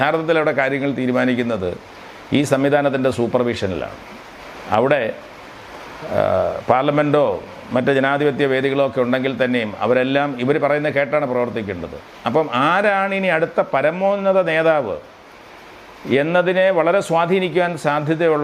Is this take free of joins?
yes; 0 cuts

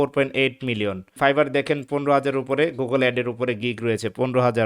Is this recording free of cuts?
no; 1 cut; at 1.1 s

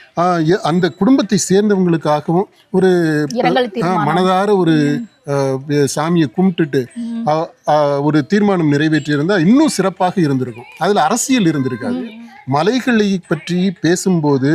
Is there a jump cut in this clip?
yes; 1 cut; at 12.2 s

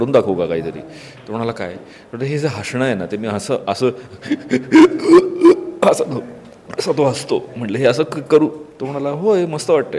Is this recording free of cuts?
yes; 0 cuts

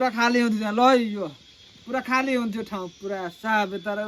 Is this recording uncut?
yes; 0 cuts

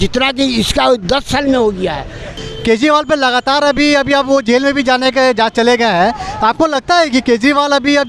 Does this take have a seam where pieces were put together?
yes; 1 cut; at 2.4 s

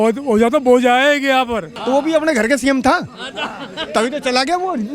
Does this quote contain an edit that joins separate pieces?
yes; 1 cut; at 1.7 s

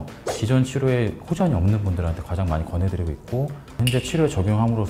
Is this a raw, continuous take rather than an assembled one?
no; 1 cut; at 3.7 s

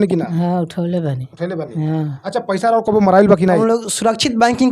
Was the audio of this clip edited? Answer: yes; 1 cut; at 3.6 s

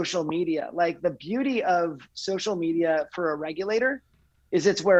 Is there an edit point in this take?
no; 0 cuts

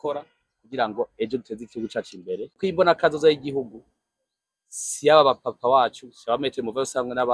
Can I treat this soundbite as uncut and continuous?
no; 1 cut; at 2.5 s

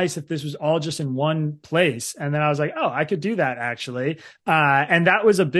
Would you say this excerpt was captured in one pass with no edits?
yes; 0 cuts

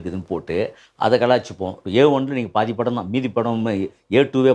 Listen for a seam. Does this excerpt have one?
yes; 1 cut; at 1.8 s

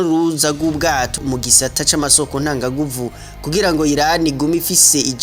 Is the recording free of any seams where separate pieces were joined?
no; 1 cut; at 1.2 s

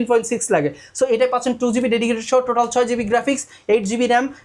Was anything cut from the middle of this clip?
no; 0 cuts

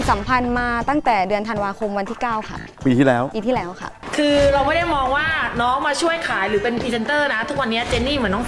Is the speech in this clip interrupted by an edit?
yes; 1 cut; at 4.0 s

